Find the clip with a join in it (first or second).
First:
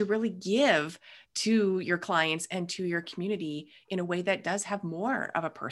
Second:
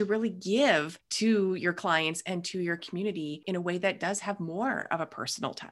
second